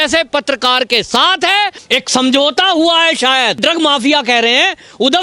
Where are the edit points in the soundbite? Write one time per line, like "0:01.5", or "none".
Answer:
0:01.8
0:03.6